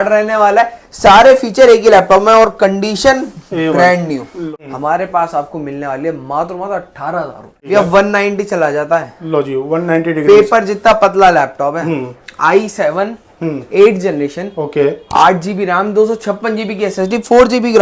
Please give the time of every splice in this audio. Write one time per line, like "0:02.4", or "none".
0:04.4
0:07.7